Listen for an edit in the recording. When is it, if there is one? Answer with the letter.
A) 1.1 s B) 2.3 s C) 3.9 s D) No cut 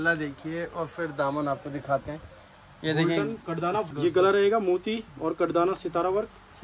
C